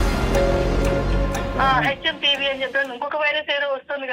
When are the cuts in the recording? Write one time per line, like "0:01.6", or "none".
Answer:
0:01.5